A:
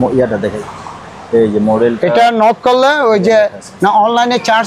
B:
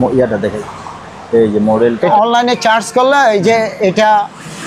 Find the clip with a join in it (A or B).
B